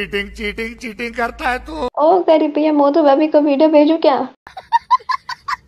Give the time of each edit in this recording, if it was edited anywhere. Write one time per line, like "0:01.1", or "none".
0:01.8
0:04.5